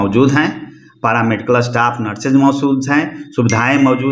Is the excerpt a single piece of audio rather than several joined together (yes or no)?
yes